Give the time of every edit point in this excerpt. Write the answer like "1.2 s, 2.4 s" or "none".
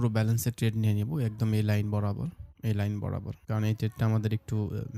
none